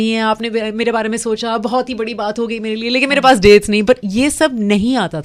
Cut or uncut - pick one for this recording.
uncut